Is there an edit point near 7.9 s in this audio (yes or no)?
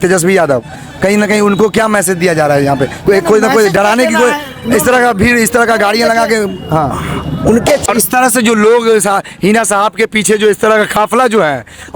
yes